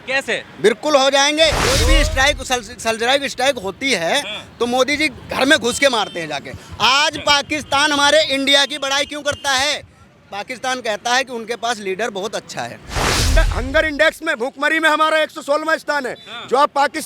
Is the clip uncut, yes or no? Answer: no